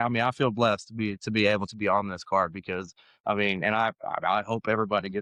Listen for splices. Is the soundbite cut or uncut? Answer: uncut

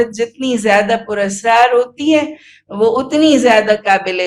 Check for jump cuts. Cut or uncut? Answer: uncut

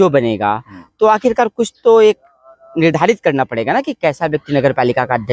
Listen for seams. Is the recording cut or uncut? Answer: uncut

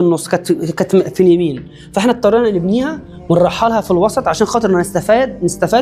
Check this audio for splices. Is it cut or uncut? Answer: uncut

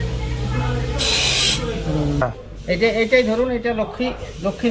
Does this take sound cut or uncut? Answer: cut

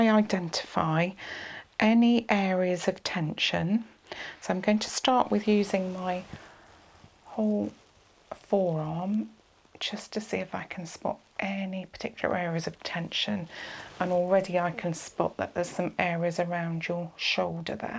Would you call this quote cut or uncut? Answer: uncut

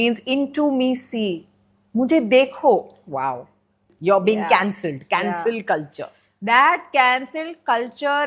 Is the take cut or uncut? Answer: cut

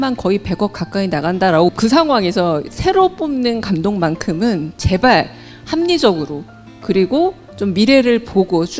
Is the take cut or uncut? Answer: cut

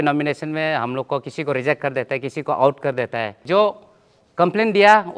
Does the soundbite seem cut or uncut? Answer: cut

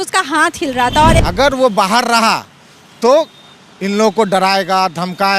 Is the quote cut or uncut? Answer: cut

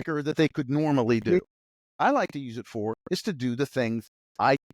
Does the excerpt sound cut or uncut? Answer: cut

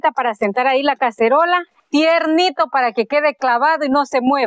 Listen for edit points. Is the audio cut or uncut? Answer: cut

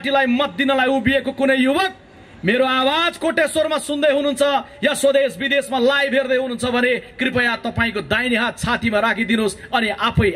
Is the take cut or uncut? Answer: uncut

